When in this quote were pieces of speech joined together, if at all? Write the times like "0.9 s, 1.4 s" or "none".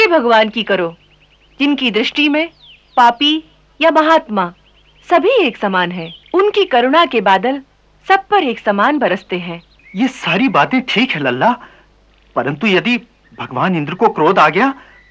none